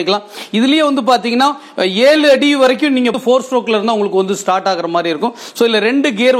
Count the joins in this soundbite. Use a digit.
1